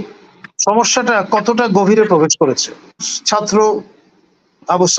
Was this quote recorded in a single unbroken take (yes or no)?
no